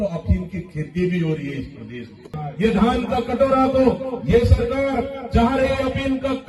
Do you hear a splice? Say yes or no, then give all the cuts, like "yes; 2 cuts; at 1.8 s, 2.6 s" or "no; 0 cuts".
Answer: yes; 1 cut; at 2.4 s